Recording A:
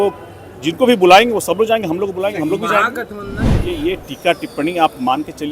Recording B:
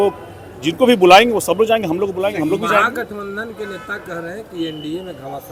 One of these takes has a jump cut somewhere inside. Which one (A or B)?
A